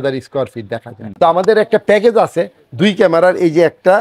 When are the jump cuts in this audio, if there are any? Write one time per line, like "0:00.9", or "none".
0:01.0